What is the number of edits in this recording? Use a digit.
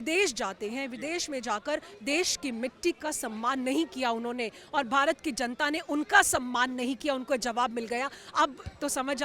0